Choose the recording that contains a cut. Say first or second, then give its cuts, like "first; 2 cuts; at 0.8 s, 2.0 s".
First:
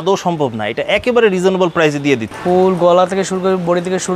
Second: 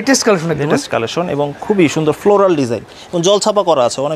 first; 1 cut; at 2.3 s